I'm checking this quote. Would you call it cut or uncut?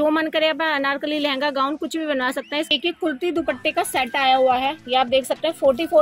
cut